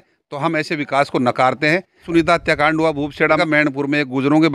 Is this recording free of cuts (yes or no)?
no